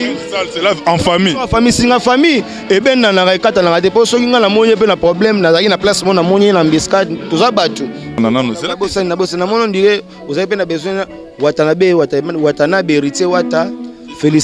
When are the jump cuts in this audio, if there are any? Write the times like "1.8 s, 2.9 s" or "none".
8.2 s